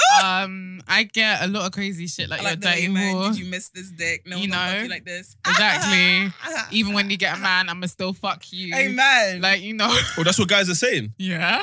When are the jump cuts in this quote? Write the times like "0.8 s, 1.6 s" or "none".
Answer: none